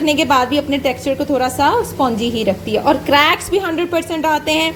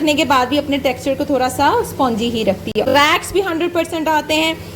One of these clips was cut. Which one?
second; 1 cut; at 2.8 s

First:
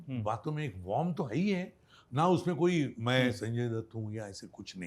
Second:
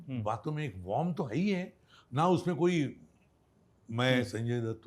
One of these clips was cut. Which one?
first; 1 cut; at 3.0 s

